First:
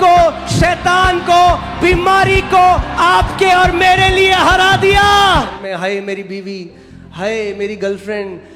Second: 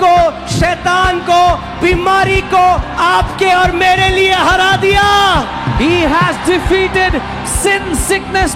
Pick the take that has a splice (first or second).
first